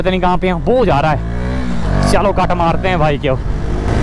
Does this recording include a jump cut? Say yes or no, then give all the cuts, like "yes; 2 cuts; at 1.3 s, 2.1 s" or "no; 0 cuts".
no; 0 cuts